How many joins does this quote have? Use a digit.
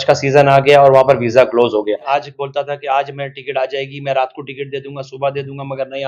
1